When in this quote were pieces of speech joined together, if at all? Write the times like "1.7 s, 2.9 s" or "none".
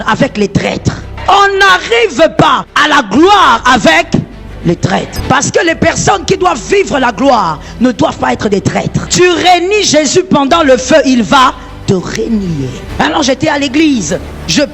1.1 s, 2.7 s, 5.2 s, 9.0 s, 12.9 s